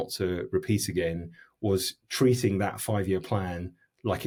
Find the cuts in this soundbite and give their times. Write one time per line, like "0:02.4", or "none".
none